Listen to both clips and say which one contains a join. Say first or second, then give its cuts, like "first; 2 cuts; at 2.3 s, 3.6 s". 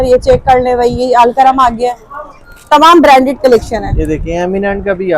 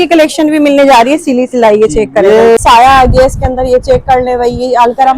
second; 1 cut; at 2.6 s